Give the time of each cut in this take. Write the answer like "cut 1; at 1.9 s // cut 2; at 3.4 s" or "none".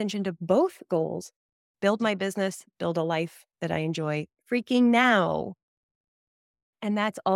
cut 1; at 4.3 s